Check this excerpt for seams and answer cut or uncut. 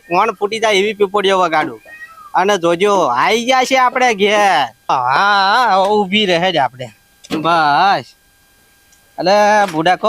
uncut